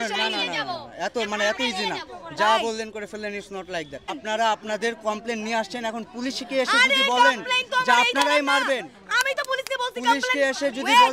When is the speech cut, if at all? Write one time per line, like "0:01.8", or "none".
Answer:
0:04.2

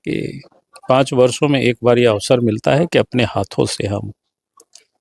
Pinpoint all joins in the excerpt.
none

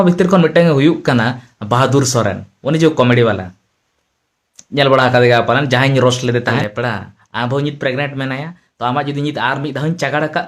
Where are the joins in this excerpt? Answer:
0:06.6

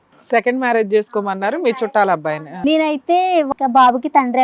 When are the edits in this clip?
0:02.5
0:03.5

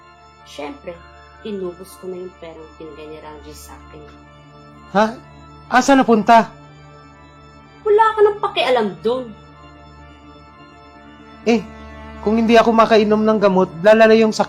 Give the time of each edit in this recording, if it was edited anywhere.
none

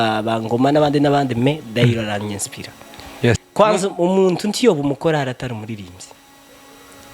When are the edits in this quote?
0:03.5

